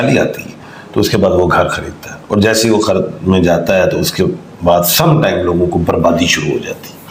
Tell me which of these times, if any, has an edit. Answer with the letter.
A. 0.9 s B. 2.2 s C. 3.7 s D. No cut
D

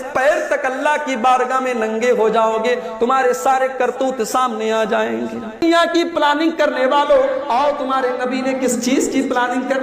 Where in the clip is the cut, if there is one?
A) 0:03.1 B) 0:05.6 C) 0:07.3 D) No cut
B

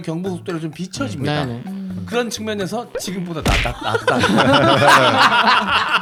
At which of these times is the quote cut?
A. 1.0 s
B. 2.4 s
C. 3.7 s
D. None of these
D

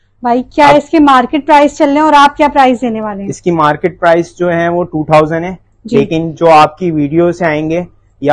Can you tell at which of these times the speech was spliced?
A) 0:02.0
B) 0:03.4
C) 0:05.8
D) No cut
D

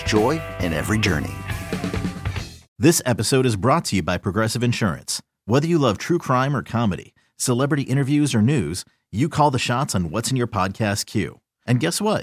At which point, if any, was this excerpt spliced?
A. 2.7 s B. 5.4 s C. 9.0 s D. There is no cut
A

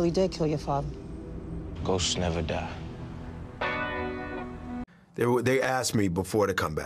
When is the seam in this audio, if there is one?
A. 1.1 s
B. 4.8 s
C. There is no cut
B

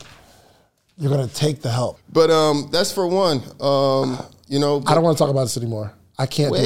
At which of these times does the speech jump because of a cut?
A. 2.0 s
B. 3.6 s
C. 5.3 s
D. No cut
A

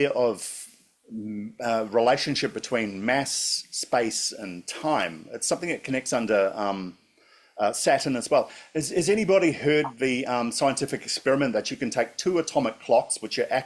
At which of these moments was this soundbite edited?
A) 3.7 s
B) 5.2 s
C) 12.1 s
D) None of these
D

